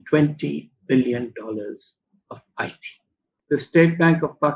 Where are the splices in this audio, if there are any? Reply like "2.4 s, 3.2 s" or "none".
3.3 s